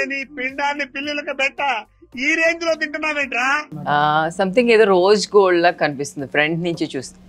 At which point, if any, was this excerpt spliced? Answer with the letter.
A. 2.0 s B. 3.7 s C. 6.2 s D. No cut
B